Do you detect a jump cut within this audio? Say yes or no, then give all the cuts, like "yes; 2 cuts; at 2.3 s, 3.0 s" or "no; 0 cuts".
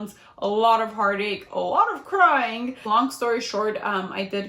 yes; 1 cut; at 2.8 s